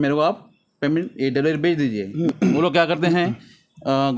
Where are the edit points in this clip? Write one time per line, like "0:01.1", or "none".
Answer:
0:02.3

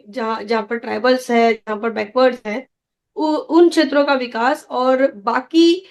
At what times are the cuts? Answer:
none

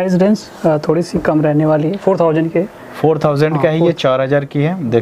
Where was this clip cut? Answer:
none

